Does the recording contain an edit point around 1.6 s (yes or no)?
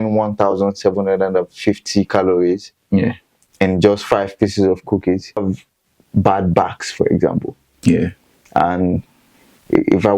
no